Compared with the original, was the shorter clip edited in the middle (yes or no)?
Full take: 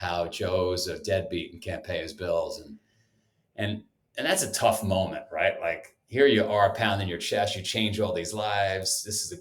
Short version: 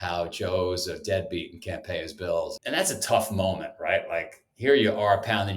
yes